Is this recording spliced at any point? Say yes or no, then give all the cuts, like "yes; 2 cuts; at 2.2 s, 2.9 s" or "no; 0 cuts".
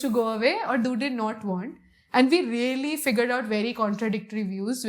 no; 0 cuts